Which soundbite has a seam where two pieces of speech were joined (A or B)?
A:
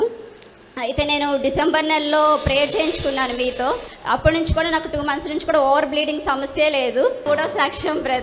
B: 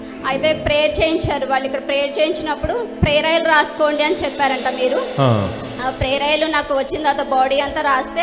A